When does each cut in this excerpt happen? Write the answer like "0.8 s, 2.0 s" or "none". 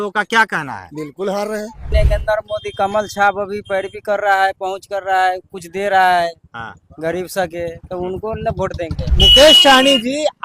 1.9 s, 9.1 s